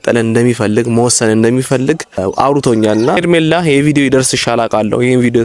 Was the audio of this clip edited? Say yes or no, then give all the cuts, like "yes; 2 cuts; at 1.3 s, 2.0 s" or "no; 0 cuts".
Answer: yes; 2 cuts; at 2.2 s, 3.2 s